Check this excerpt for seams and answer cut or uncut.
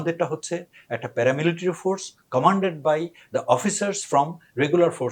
uncut